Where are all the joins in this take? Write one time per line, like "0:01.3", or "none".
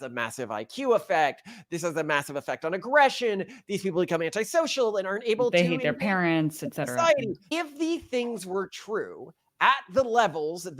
0:07.5